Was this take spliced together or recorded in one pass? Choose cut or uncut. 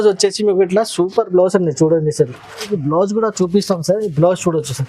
cut